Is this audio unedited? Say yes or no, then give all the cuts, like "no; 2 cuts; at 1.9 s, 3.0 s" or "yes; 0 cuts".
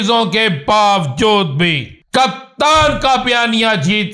no; 1 cut; at 1.9 s